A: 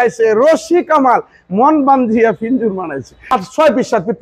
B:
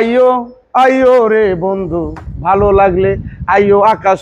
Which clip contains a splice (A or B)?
A